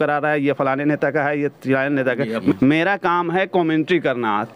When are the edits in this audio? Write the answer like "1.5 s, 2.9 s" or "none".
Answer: 2.5 s